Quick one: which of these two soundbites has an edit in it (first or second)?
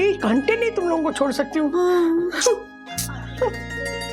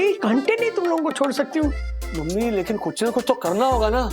second